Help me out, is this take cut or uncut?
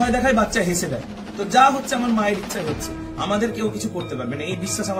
uncut